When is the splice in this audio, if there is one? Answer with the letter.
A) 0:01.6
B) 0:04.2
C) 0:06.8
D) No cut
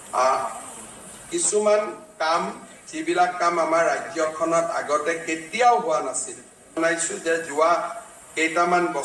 C